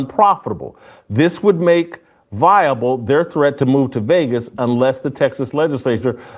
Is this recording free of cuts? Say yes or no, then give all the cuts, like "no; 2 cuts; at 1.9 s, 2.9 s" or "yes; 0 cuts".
no; 1 cut; at 3.5 s